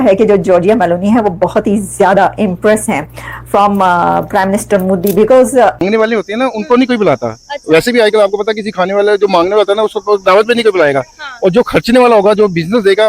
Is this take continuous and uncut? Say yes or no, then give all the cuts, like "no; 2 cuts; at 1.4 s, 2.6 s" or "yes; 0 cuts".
no; 1 cut; at 5.8 s